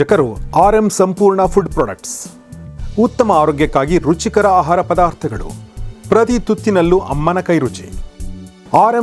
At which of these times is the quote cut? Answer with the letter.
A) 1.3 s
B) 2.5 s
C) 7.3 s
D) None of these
D